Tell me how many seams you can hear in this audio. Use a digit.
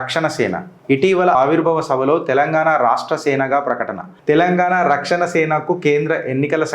1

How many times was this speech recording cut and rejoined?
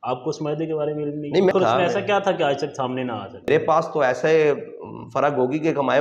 2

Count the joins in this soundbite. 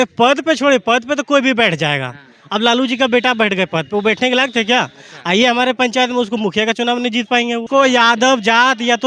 1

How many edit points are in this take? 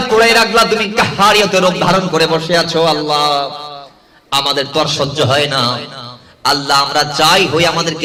0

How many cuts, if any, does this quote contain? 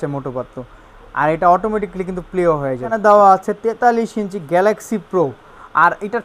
1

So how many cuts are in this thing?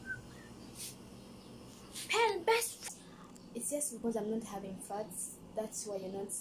1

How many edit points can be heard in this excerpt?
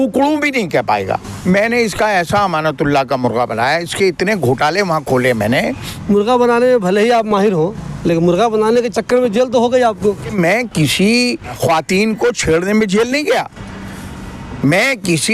4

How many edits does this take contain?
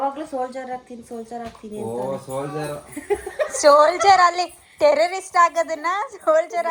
0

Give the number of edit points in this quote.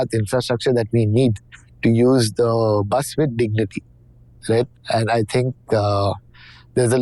0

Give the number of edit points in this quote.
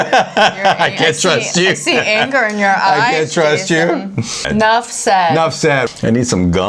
2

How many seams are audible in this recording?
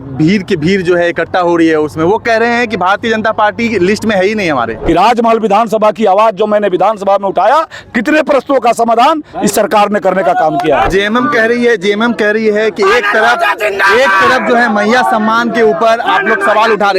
2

